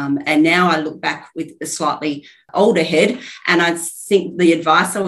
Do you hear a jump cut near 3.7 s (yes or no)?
no